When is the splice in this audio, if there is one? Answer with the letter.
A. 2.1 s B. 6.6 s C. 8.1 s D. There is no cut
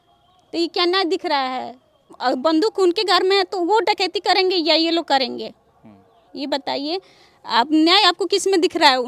A